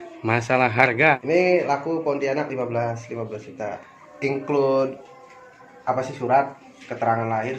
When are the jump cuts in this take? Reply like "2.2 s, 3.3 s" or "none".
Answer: 1.2 s, 3.9 s